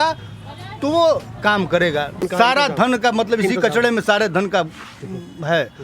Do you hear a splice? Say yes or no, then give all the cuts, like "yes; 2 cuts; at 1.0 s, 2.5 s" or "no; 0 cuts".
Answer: yes; 1 cut; at 2.2 s